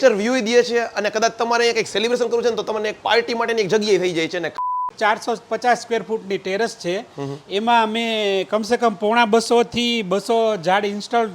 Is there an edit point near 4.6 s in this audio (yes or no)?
yes